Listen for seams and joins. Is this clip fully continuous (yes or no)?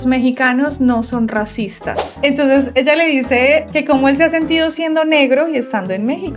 no